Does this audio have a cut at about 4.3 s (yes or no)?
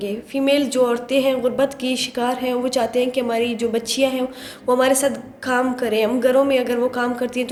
no